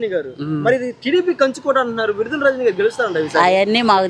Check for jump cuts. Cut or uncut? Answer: uncut